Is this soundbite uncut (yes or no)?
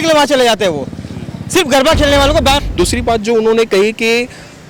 no